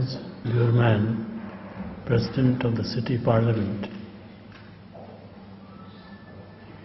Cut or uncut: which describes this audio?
uncut